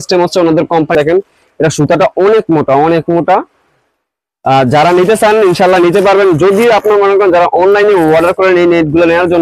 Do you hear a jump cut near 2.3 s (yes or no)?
no